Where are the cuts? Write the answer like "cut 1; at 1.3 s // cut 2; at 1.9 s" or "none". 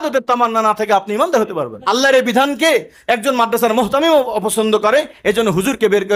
cut 1; at 1.7 s